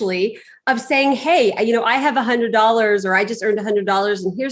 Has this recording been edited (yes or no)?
no